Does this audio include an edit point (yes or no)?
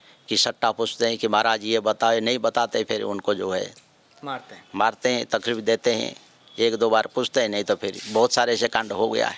no